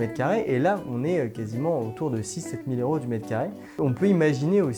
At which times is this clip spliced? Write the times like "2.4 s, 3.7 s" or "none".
none